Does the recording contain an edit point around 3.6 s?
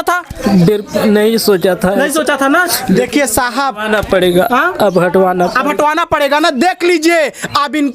no; 0 cuts

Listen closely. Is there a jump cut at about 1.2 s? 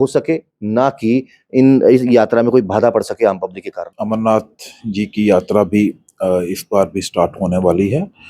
no; 1 cut; at 3.8 s

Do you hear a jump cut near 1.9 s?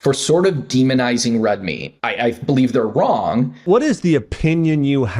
yes; 2 cuts; at 1.9 s, 3.6 s

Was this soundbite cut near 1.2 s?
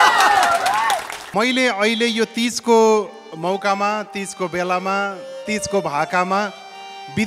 yes; 1 cut; at 1.2 s

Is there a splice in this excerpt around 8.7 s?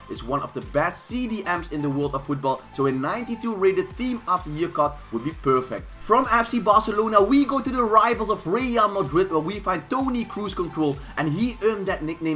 no; 1 cut; at 1.5 s

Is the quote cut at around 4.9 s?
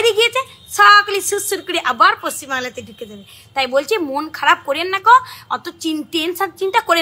no; 0 cuts

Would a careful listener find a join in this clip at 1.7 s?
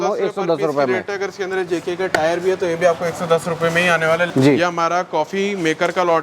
no; 1 cut; at 4.3 s

